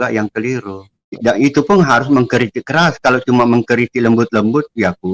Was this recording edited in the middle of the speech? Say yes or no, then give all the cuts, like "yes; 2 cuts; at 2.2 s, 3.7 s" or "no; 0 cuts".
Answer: yes; 1 cut; at 1.2 s